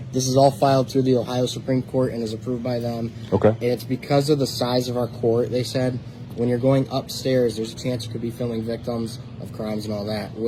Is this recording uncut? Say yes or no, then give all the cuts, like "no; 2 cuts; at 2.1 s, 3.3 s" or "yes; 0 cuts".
yes; 0 cuts